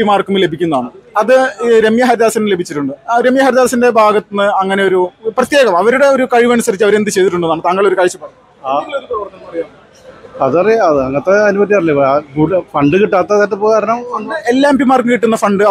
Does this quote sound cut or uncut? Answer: uncut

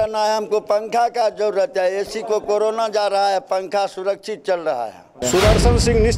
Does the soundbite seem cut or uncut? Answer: cut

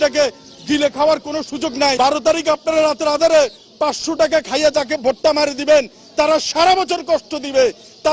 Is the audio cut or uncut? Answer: cut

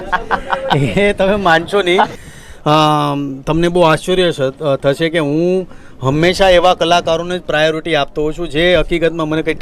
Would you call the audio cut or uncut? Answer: cut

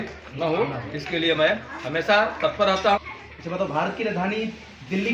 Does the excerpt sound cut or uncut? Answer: cut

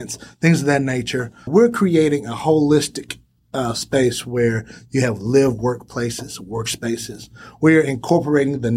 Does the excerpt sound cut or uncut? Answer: cut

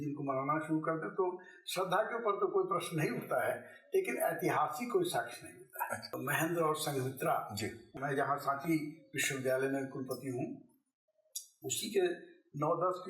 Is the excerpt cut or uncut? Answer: cut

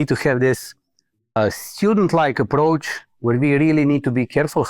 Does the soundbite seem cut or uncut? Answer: cut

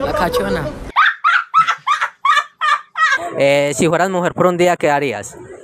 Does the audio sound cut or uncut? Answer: cut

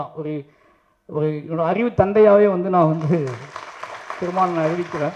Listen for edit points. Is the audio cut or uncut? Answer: uncut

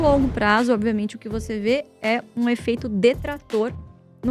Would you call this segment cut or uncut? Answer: uncut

